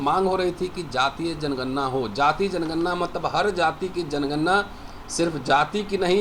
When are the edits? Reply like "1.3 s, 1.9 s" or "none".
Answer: none